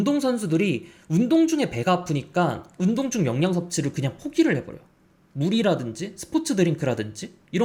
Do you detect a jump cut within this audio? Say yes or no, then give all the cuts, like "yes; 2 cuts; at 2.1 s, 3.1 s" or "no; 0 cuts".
no; 0 cuts